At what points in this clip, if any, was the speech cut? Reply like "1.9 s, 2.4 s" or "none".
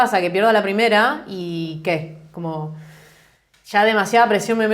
none